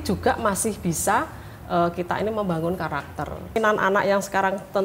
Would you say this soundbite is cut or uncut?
cut